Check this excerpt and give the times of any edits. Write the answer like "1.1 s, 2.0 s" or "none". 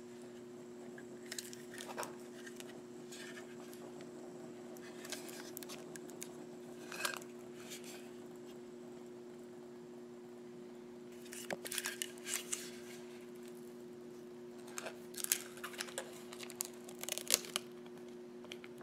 11.5 s